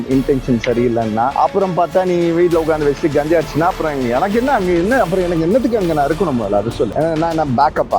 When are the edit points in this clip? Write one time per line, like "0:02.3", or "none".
0:01.3
0:06.9